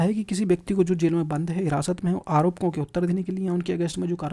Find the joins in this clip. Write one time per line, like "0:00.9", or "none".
none